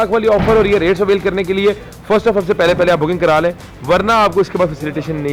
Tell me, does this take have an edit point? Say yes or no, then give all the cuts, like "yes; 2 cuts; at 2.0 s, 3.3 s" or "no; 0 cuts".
no; 0 cuts